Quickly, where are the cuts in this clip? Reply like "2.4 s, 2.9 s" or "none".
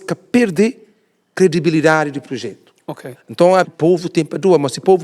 3.7 s